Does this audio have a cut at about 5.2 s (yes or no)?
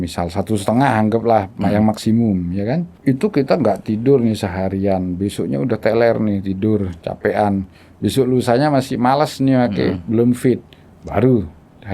no